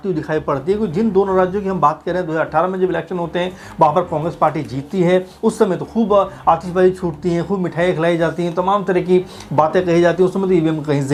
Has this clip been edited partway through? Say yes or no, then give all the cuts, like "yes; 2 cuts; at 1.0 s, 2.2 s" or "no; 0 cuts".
no; 0 cuts